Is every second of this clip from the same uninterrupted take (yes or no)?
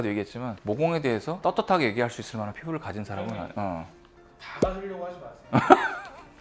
yes